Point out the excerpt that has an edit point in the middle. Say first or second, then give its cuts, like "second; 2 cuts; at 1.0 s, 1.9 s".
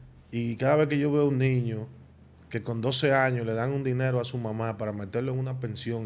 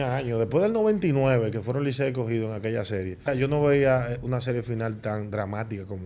second; 1 cut; at 3.3 s